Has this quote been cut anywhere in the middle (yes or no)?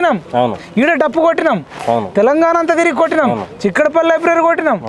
no